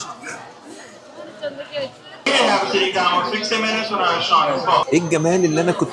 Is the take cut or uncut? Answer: cut